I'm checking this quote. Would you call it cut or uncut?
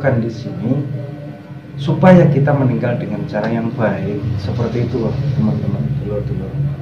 uncut